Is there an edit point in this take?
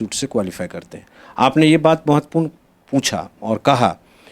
no; 0 cuts

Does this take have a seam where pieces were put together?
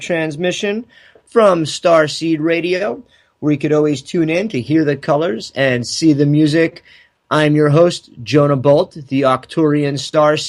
no; 0 cuts

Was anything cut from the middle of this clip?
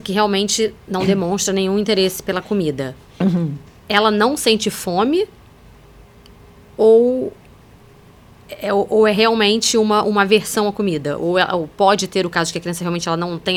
no; 0 cuts

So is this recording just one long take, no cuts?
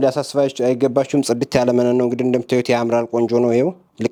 yes; 0 cuts

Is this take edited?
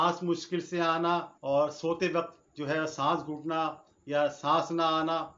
yes; 1 cut; at 1.3 s

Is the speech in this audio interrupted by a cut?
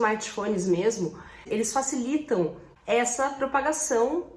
yes; 2 cuts; at 1.4 s, 2.7 s

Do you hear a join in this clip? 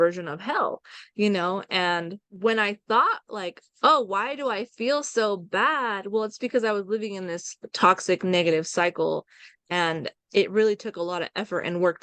yes; 1 cut; at 2.2 s

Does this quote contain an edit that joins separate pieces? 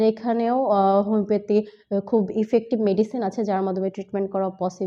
no; 0 cuts

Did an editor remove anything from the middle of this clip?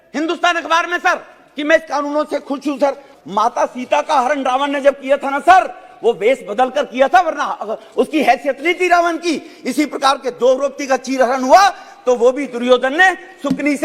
yes; 1 cut; at 3.1 s

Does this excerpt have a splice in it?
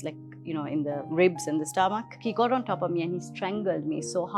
yes; 1 cut; at 2.1 s

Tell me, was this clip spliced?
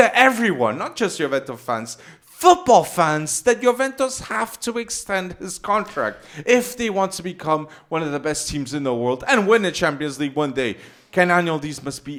no; 0 cuts

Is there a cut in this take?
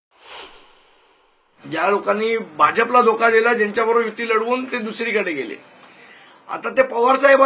yes; 1 cut; at 1.3 s

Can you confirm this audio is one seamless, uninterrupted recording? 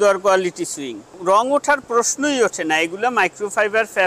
no; 1 cut; at 1.2 s

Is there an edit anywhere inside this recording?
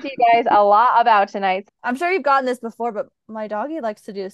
yes; 1 cut; at 1.6 s

